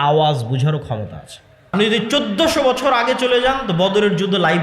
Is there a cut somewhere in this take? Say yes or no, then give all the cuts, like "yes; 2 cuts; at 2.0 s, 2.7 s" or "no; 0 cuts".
yes; 1 cut; at 1.7 s